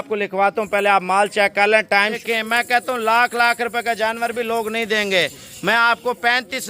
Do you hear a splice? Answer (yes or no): yes